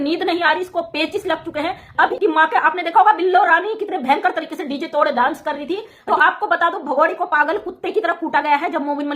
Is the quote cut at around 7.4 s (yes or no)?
no